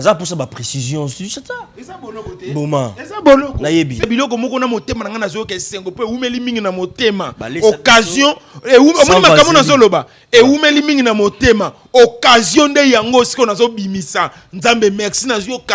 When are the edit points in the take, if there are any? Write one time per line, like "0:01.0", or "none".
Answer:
0:04.0